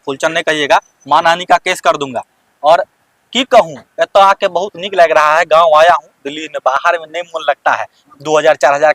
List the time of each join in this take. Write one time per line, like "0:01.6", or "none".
none